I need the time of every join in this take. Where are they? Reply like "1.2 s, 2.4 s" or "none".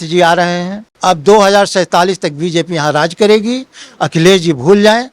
0.9 s